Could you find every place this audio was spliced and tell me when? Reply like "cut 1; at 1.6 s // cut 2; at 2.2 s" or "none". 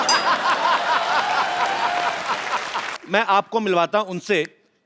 cut 1; at 2.9 s